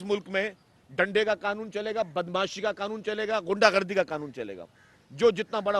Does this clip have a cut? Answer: no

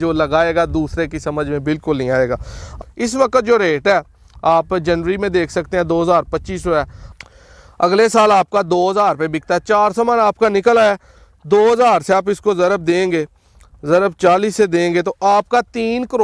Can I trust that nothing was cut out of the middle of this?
no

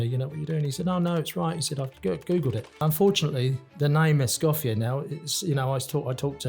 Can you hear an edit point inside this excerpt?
yes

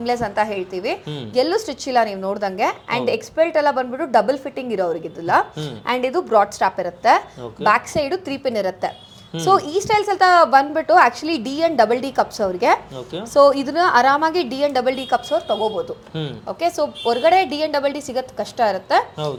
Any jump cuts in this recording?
no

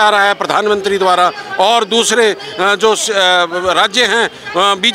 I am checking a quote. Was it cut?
no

